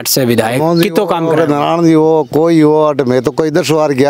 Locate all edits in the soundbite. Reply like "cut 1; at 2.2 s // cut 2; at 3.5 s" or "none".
none